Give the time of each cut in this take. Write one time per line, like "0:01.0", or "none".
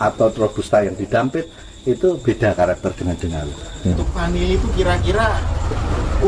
0:03.9